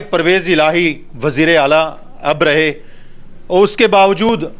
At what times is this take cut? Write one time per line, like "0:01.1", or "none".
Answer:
none